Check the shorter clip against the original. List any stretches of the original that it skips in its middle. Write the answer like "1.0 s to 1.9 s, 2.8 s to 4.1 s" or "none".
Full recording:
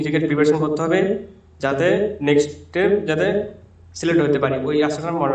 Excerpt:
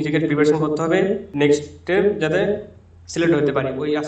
1.3 s to 2.2 s